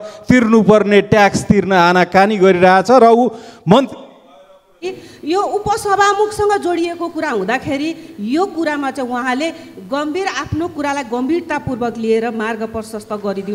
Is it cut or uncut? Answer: cut